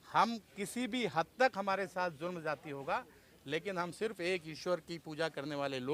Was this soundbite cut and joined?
no; 0 cuts

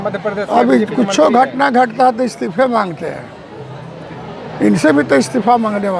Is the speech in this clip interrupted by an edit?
no; 0 cuts

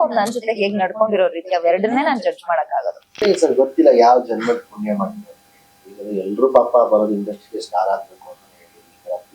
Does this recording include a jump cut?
yes; 1 cut; at 3.1 s

